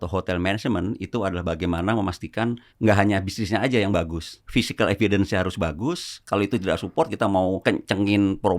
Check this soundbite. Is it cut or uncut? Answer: cut